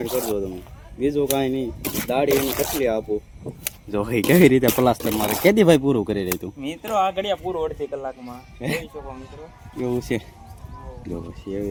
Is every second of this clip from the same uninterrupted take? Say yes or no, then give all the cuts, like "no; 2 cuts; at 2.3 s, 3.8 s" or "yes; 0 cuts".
yes; 0 cuts